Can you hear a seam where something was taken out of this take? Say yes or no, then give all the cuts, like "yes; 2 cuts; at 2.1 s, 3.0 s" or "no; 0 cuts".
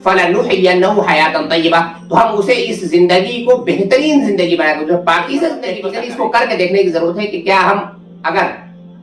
yes; 1 cut; at 5.8 s